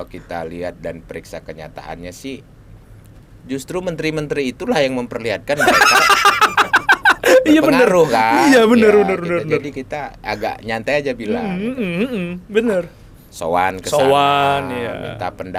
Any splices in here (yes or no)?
no